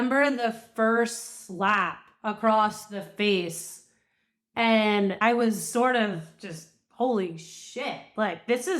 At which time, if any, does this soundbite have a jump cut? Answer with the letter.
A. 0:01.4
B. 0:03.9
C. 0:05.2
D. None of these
C